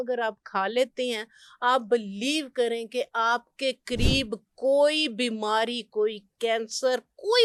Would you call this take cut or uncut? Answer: uncut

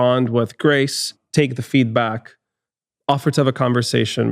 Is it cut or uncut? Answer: cut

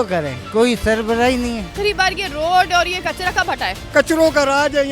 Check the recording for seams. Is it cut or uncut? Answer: cut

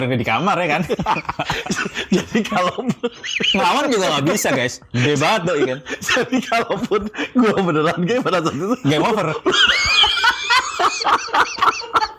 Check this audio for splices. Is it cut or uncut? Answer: uncut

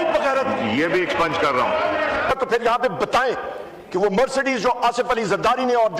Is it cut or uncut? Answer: cut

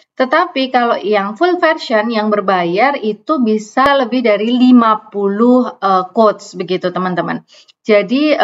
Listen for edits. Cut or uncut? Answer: uncut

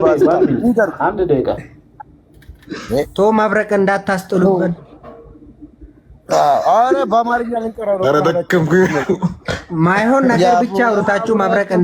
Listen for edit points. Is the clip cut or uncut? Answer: uncut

